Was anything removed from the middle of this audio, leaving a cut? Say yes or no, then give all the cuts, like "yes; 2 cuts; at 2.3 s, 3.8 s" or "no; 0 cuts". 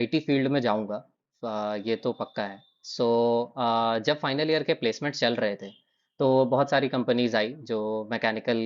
no; 0 cuts